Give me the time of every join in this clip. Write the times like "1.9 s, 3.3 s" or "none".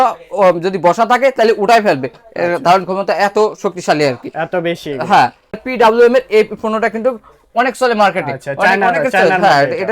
5.5 s

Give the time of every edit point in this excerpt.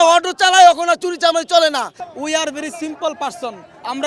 2.0 s

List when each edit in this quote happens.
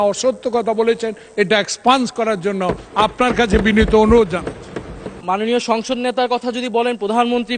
5.2 s

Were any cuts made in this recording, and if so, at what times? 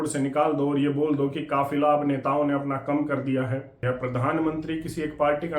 3.7 s

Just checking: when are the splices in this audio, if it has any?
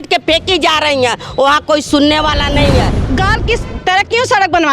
3.0 s

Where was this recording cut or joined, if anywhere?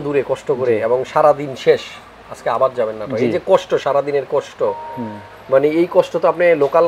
none

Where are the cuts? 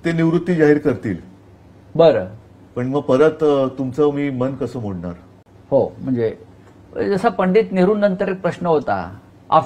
none

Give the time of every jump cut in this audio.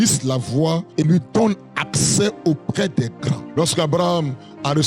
0.9 s, 3.4 s

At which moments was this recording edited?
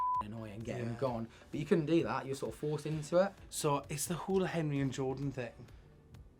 3.4 s

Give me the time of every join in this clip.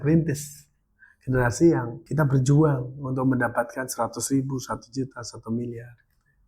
2.0 s

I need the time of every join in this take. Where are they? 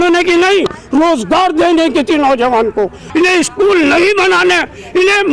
3.0 s

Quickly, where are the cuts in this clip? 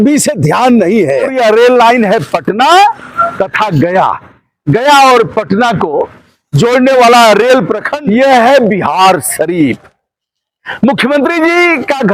1.3 s, 7.9 s

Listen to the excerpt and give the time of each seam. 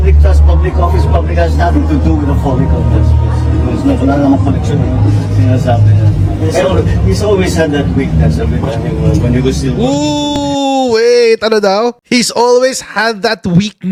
none

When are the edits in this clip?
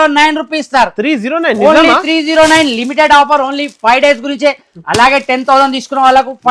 none

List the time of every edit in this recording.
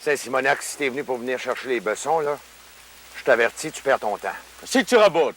none

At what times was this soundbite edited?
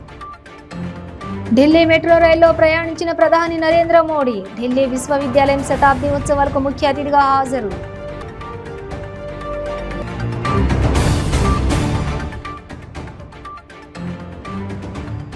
1.4 s

